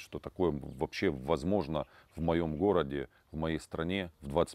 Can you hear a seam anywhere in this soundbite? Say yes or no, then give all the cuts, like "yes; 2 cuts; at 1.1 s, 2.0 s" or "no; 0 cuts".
no; 0 cuts